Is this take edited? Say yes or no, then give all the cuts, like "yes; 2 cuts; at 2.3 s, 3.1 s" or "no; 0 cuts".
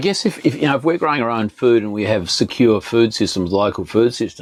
no; 0 cuts